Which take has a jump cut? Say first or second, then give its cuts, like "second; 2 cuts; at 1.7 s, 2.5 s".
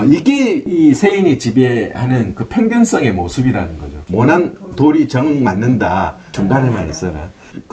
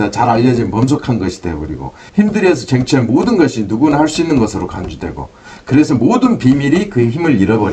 first; 1 cut; at 6.2 s